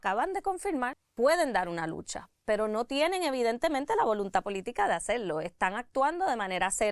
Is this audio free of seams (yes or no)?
no